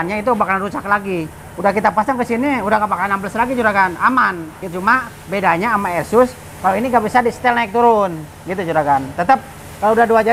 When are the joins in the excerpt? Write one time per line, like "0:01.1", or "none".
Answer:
none